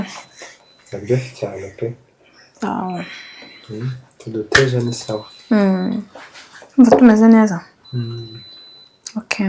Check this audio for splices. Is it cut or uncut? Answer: uncut